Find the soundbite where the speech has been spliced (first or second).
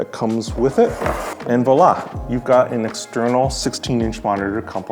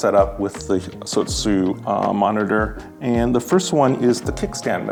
first